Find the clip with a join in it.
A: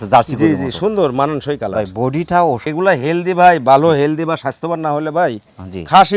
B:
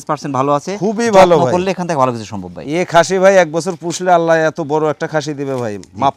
A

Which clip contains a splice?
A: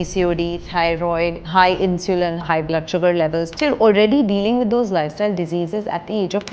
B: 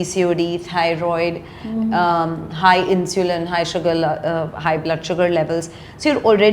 A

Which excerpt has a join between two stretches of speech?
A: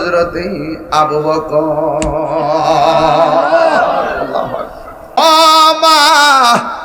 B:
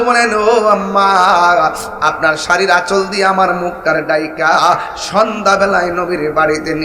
A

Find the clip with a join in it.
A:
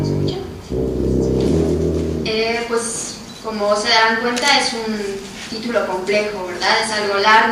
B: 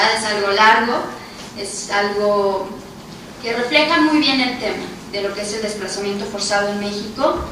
B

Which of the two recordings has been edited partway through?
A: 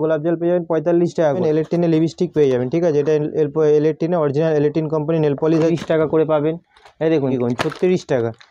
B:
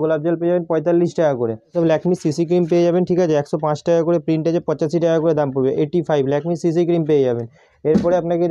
A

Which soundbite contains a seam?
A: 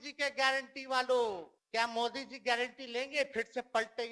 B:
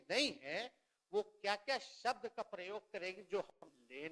A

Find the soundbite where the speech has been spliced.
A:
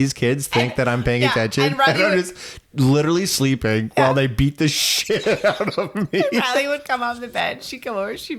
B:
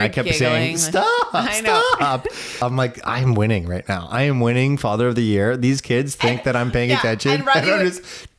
B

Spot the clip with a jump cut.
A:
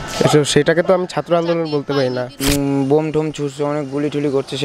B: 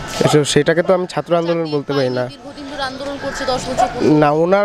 A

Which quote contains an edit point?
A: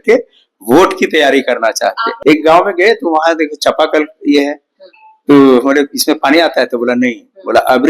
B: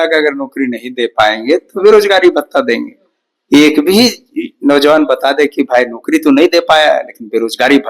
A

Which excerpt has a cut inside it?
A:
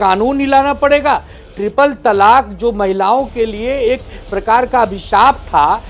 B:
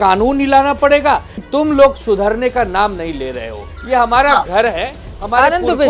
B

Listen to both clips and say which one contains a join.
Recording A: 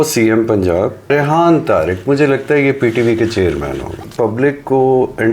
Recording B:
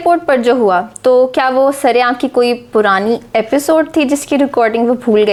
A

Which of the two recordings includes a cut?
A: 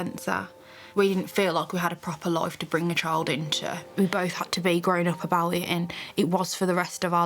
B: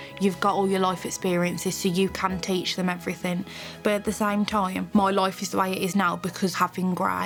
A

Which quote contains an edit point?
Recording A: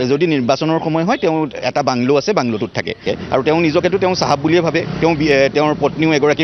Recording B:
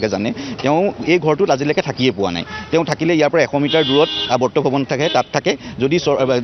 A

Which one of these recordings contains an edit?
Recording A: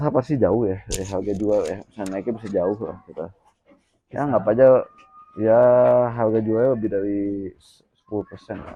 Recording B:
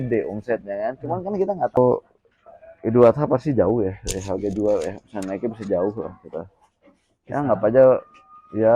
B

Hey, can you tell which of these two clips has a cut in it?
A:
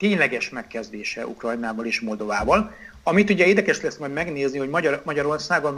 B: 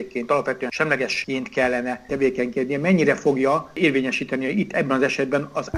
B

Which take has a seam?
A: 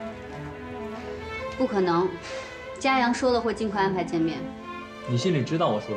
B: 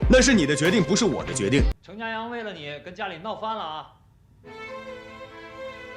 B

